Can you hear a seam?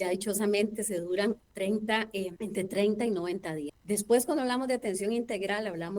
yes; 2 cuts; at 2.4 s, 3.7 s

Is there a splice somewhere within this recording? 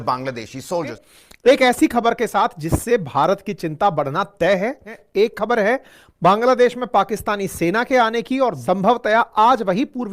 yes; 3 cuts; at 1.1 s, 4.9 s, 8.6 s

